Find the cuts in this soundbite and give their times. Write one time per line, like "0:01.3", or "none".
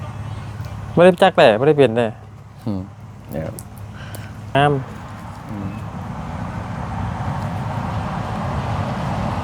0:04.5

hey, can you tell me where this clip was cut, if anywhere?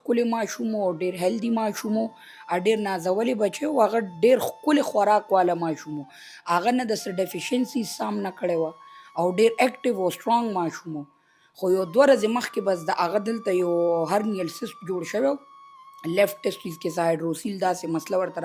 none

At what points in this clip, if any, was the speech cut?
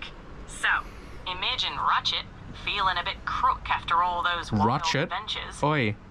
none

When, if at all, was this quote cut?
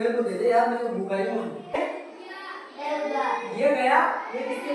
0:01.8

